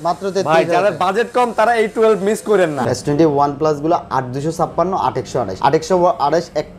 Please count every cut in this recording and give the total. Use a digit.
2